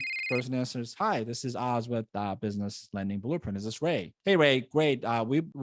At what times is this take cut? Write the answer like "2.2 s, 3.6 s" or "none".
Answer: none